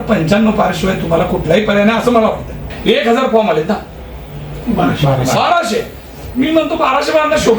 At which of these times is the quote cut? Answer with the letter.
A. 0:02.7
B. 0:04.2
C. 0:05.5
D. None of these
A